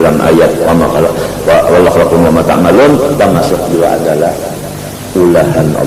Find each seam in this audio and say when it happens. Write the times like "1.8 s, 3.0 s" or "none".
none